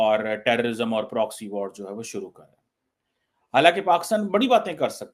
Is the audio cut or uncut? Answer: uncut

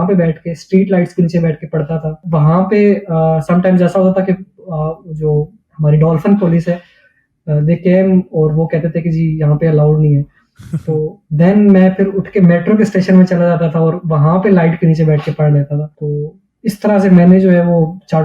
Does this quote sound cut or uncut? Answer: cut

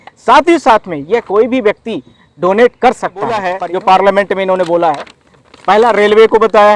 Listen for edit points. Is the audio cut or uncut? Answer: cut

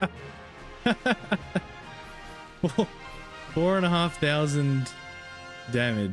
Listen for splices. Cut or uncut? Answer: uncut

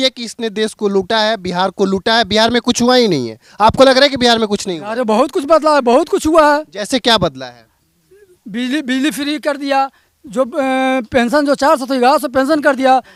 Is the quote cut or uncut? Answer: uncut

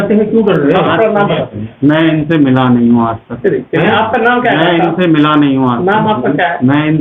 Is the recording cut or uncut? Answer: uncut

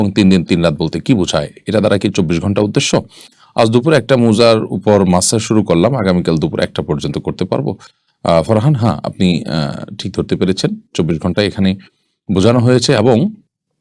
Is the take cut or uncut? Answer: uncut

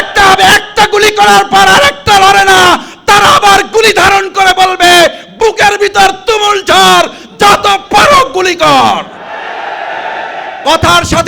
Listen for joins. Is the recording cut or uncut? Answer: cut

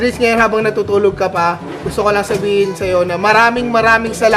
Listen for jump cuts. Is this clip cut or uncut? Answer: uncut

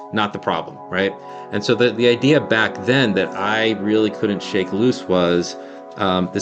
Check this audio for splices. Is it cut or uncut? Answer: cut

